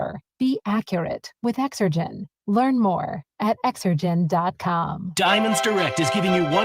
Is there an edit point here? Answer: yes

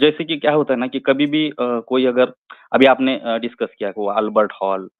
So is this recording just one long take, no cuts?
yes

